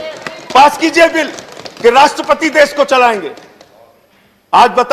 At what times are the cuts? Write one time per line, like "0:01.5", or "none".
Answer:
none